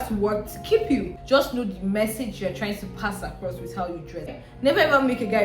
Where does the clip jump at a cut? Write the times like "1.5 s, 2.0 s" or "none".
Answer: 1.2 s, 4.4 s